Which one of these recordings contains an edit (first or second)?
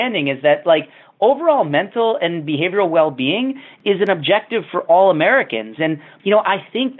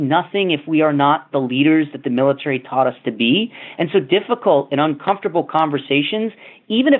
first